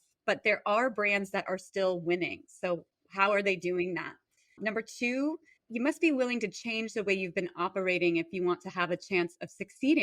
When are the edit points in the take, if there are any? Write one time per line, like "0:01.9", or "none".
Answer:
0:03.0
0:05.5